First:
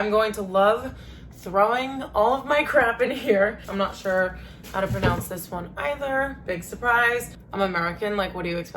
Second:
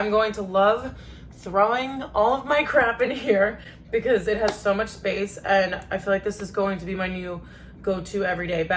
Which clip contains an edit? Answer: first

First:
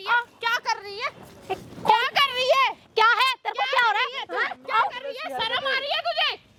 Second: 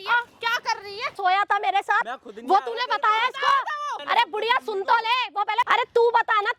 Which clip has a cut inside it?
second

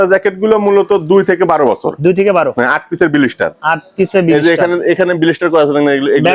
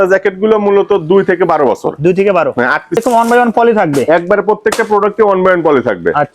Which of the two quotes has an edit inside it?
second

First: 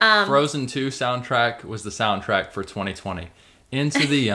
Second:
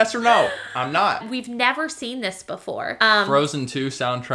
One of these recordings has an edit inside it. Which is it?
second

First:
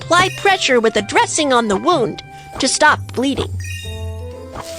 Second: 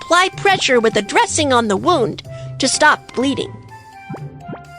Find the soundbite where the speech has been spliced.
second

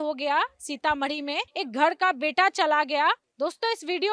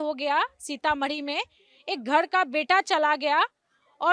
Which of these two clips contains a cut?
first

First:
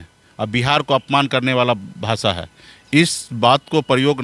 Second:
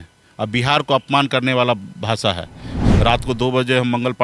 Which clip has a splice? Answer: second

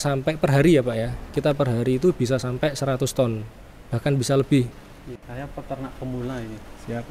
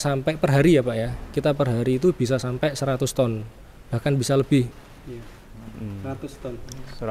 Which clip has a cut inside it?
first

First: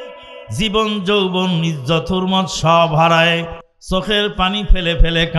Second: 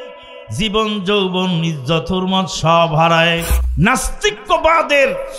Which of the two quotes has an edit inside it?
second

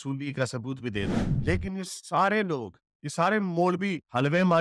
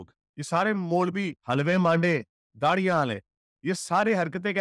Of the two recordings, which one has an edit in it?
first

